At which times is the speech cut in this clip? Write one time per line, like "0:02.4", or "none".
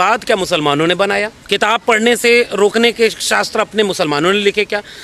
0:01.4